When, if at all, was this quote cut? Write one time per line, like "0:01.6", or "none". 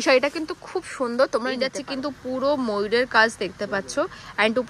0:01.8

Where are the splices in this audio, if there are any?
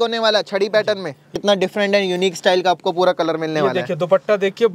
0:01.3

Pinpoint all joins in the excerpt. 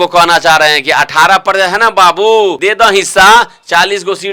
0:02.6

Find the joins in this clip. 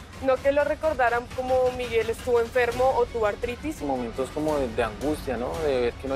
0:03.7

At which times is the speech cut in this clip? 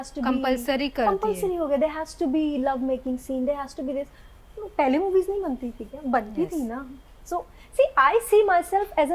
none

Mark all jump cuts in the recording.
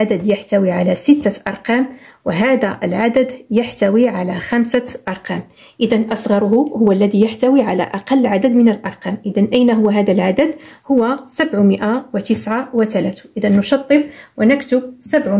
none

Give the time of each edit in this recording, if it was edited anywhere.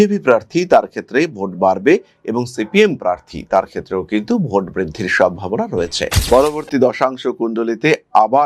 0:06.1

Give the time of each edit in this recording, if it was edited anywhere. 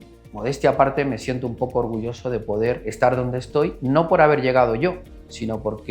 0:02.9
0:03.8

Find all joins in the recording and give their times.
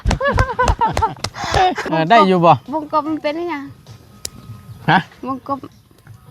0:01.8

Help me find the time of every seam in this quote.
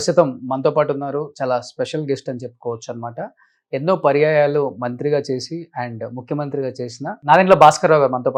none

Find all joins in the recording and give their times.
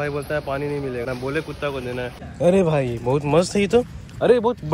0:01.1
0:02.2

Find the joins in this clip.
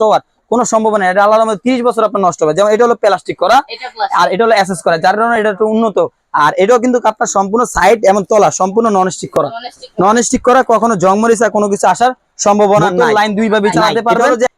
0:12.9

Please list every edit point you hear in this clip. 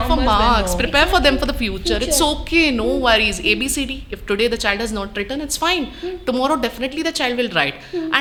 none

